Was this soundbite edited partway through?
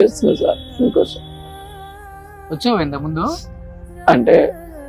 no; 0 cuts

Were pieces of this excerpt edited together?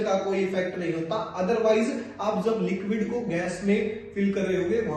no; 0 cuts

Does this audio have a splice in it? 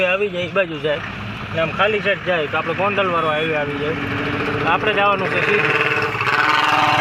no; 0 cuts

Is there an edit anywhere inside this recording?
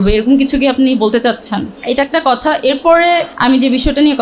yes; 2 cuts; at 1.7 s, 3.3 s

